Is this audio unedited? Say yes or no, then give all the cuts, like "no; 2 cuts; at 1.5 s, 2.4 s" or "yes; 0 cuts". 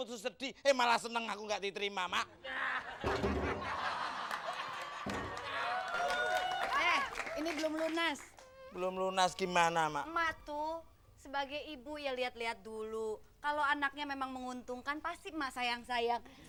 yes; 0 cuts